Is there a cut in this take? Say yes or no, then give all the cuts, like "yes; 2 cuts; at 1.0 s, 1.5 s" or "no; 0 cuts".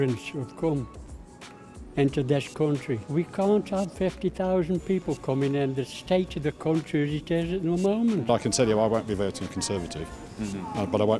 yes; 2 cuts; at 3.0 s, 8.2 s